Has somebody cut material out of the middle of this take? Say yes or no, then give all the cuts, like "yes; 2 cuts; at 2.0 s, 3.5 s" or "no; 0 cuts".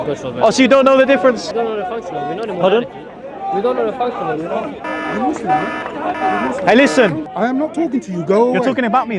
yes; 2 cuts; at 1.5 s, 7.3 s